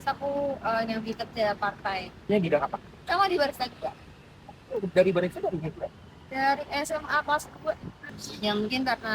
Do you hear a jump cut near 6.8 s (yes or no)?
no